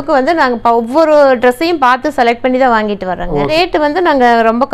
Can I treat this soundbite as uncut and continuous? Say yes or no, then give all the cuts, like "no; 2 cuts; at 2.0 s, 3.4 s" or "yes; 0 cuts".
no; 1 cut; at 3.5 s